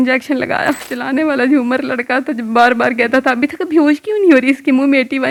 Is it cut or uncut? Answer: uncut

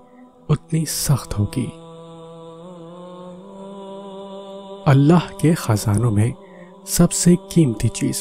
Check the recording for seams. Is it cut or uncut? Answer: cut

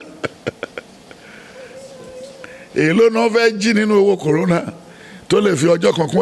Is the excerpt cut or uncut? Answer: uncut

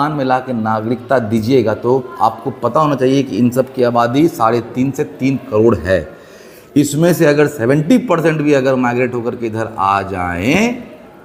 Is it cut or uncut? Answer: uncut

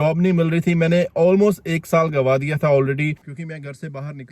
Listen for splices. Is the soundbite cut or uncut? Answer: cut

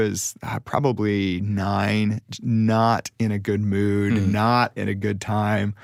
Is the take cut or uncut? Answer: uncut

